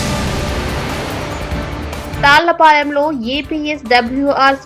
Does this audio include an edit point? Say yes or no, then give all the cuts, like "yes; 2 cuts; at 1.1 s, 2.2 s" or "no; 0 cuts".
no; 0 cuts